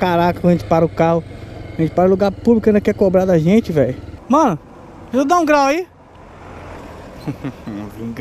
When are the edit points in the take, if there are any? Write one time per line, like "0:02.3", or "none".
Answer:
0:04.1
0:06.8